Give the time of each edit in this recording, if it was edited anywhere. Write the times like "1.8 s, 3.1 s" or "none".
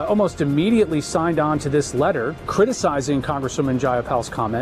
2.5 s